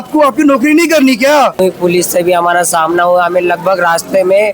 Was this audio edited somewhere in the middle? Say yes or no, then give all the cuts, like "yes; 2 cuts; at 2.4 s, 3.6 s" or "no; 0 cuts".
yes; 1 cut; at 1.6 s